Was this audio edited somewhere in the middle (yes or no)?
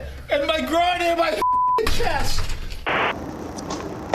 yes